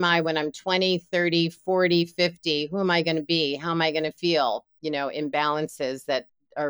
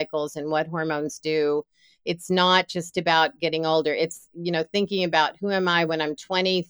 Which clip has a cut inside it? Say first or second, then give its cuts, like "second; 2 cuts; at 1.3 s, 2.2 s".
first; 1 cut; at 4.8 s